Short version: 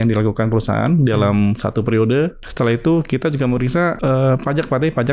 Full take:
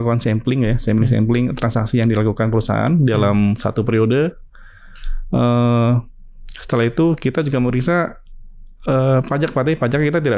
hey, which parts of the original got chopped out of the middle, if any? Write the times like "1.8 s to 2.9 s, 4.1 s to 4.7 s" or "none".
4.4 s to 6.6 s, 8.1 s to 8.8 s